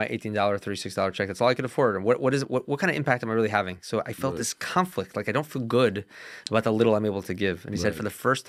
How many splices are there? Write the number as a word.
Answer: zero